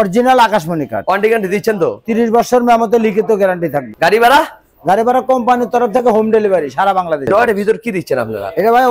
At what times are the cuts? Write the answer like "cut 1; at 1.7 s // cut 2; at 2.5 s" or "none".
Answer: cut 1; at 3.9 s // cut 2; at 7.3 s